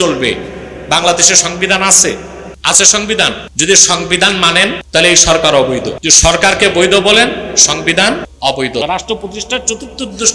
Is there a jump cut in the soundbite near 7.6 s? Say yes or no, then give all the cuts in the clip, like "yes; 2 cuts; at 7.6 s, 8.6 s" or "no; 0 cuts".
no; 4 cuts; at 3.5 s, 4.8 s, 6.0 s, 8.8 s